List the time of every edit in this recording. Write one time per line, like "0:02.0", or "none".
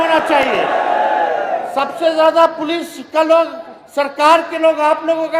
none